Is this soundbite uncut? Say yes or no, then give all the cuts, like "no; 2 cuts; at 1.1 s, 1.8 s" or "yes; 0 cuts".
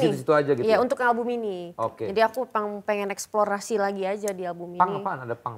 yes; 0 cuts